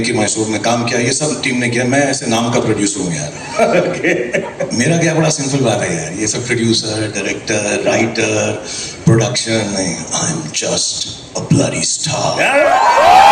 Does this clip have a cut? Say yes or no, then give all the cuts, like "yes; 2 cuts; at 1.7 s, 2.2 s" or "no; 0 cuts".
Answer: no; 0 cuts